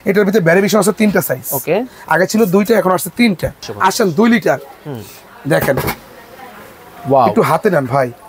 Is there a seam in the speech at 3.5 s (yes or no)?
yes